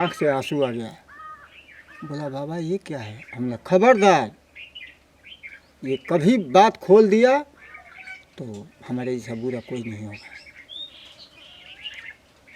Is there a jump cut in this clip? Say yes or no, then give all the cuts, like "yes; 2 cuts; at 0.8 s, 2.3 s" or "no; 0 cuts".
no; 0 cuts